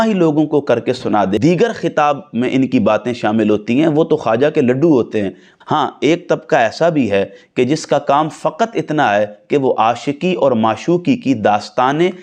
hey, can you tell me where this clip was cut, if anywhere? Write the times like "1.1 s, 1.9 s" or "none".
1.3 s, 5.5 s